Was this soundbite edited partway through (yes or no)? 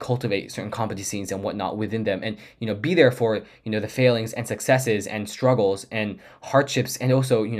no